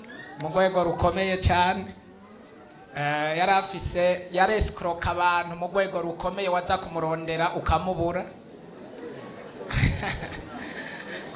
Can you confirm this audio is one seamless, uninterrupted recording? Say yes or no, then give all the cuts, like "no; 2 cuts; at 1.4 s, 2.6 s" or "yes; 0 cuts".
yes; 0 cuts